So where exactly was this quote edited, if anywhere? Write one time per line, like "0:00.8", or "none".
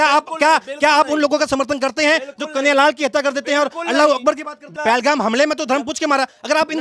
0:04.6